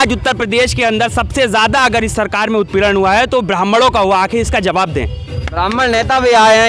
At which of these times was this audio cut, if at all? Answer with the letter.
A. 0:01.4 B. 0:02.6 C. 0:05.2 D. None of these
D